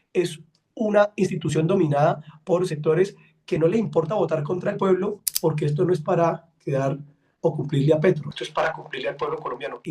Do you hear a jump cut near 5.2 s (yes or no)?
yes